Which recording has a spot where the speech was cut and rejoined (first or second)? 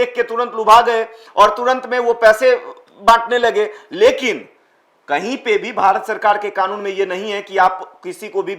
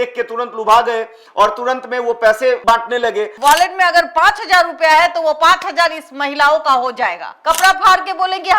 second